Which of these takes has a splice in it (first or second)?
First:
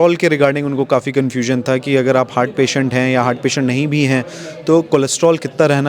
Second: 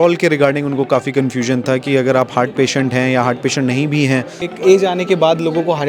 second